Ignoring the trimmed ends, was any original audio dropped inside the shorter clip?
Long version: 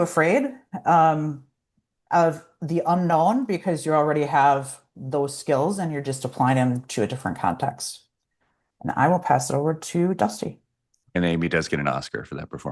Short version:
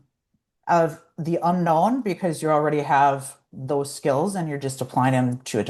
no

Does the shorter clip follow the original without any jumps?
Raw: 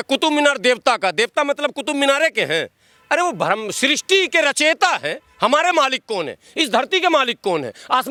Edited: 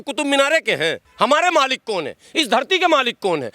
no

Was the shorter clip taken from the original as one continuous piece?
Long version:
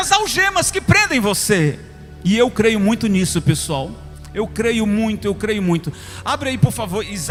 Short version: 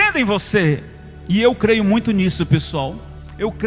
yes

